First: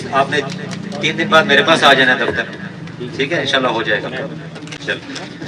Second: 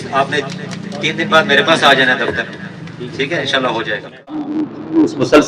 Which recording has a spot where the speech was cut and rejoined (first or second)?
second